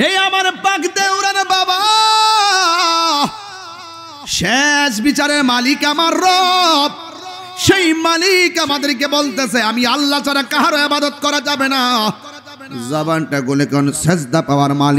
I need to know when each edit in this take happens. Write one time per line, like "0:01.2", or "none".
none